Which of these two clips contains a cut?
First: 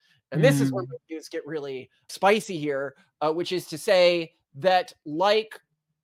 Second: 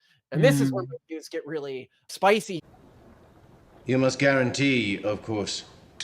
second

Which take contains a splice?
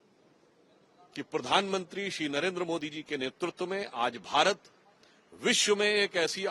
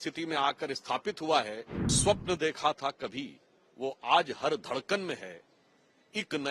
second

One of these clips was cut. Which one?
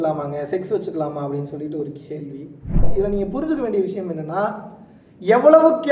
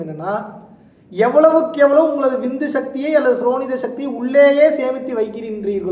first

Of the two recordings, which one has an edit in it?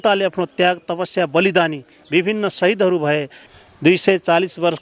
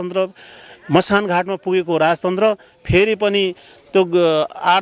first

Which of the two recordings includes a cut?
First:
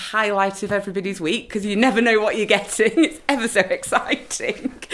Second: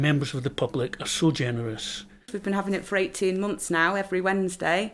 second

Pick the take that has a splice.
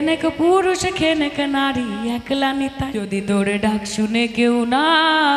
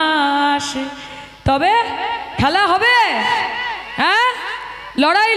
first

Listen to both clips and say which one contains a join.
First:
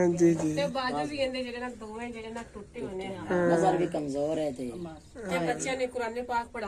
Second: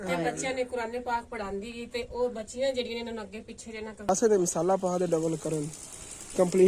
second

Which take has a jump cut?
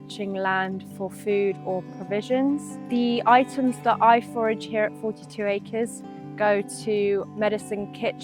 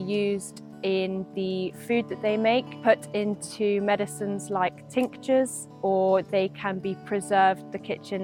first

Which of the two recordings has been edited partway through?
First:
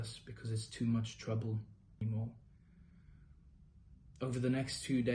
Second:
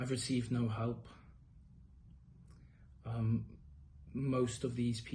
first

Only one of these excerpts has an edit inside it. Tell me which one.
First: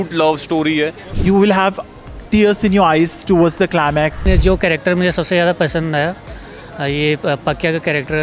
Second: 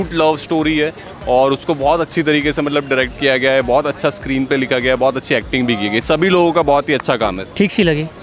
first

